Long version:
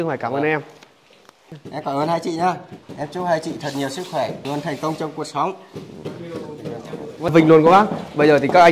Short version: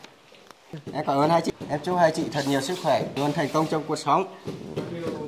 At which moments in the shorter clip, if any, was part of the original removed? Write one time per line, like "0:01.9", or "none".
0:01.5